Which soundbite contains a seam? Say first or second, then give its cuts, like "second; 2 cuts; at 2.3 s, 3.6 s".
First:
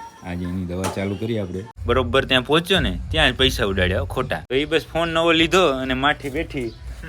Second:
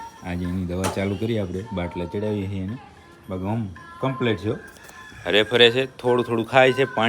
first; 2 cuts; at 1.7 s, 4.4 s